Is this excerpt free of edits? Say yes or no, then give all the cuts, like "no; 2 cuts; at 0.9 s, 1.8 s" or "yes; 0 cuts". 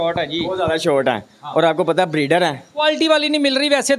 yes; 0 cuts